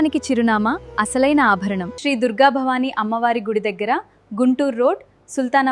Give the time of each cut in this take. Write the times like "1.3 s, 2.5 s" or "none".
1.9 s

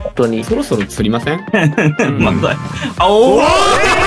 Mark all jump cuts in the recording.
1.4 s

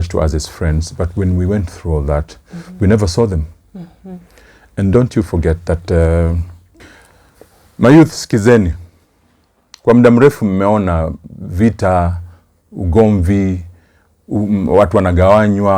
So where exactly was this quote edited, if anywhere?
6.7 s

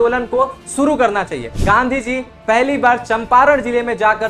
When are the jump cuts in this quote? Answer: 1.5 s

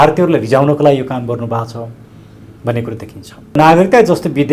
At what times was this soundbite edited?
3.5 s

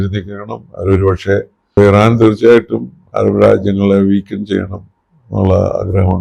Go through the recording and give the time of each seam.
1.8 s

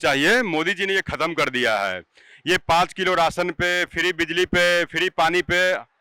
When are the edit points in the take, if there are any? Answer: none

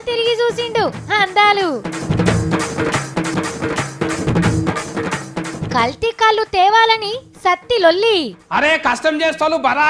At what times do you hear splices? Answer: 3.3 s, 4.7 s

